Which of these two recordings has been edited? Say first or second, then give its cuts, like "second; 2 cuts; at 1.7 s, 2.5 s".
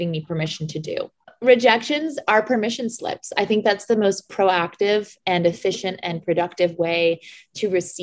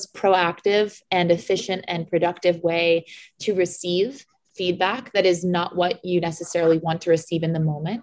first; 1 cut; at 1.1 s